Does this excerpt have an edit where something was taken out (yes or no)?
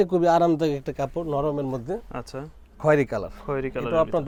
no